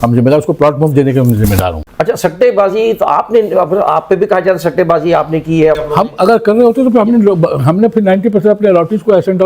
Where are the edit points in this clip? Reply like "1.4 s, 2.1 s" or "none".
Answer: 1.9 s